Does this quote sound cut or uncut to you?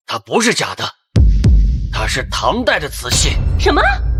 uncut